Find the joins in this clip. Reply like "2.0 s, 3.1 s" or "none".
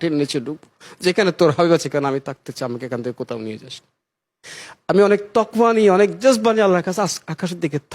none